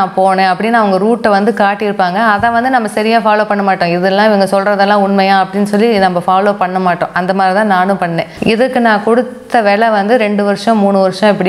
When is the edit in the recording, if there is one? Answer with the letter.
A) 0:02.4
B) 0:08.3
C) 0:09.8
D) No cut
B